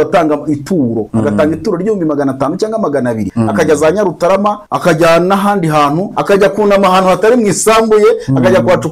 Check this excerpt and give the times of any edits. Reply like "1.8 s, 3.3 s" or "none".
3.3 s, 4.7 s, 6.1 s

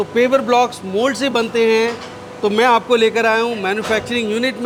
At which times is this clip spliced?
none

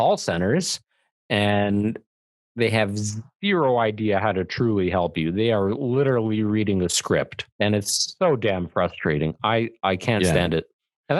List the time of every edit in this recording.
7.4 s

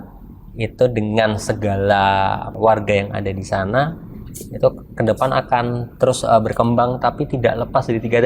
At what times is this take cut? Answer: 2.5 s

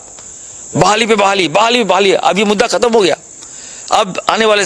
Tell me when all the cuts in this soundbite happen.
none

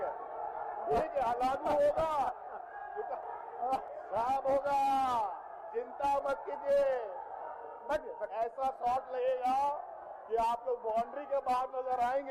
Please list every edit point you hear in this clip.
3.9 s

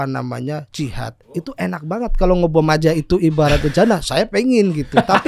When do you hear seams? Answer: 1.3 s

